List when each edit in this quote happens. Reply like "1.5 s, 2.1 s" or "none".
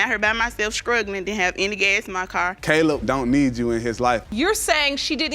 2.6 s